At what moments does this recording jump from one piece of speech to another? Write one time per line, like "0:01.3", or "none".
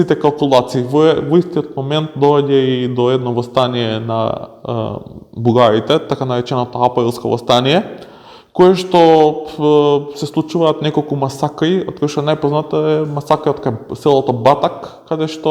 none